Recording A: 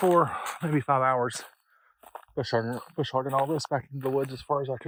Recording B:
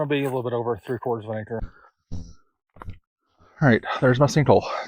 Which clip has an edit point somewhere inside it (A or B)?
B